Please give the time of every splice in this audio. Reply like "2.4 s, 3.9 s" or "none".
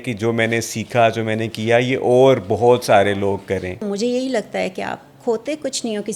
3.8 s